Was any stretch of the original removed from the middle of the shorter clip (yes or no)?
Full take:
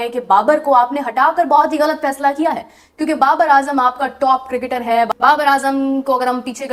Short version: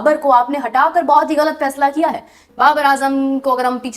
yes